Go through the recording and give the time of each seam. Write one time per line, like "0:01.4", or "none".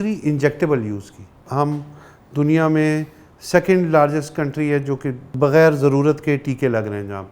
0:01.4
0:05.3